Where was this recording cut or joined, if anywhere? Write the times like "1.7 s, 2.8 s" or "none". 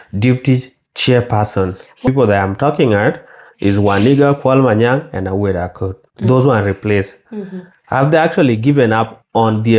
2.0 s